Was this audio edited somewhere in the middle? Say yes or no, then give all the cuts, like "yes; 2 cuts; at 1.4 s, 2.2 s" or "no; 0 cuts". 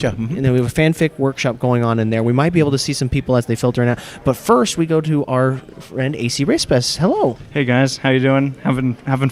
no; 0 cuts